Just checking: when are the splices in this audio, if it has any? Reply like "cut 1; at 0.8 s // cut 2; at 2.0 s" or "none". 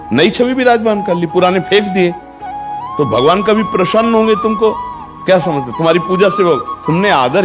none